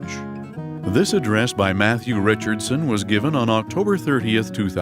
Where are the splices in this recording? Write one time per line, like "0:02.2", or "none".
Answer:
0:00.9